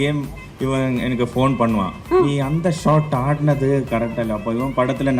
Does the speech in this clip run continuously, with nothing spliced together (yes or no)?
yes